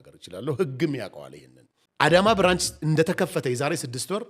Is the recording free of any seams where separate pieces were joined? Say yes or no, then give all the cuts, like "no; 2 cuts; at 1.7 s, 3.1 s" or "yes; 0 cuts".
no; 1 cut; at 2.2 s